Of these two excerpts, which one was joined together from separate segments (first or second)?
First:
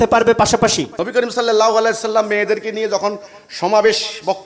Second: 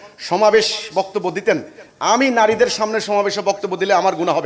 first